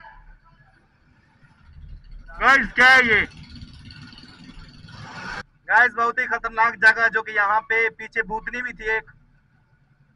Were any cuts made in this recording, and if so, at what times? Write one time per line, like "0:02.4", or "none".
0:05.4

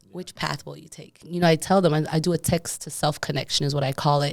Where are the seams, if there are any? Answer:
0:01.2

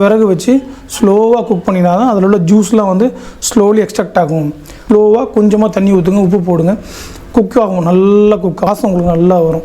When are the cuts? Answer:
0:04.8
0:08.7

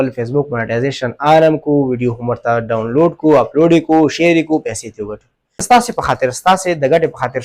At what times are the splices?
0:05.6

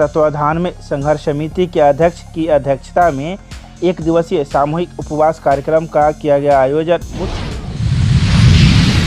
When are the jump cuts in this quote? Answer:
0:07.2

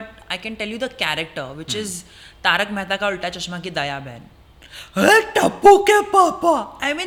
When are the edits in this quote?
none

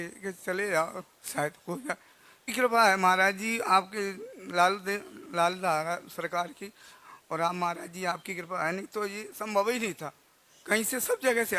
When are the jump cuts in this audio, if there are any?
0:02.5

